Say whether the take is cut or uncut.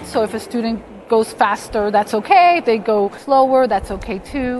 cut